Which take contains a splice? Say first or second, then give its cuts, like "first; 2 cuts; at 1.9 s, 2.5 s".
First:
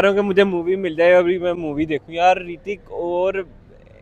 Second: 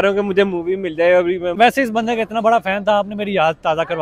second; 1 cut; at 1.5 s